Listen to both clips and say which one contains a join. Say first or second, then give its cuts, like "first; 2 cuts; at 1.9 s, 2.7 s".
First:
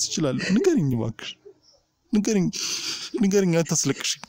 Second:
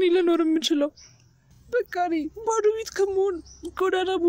second; 1 cut; at 1.5 s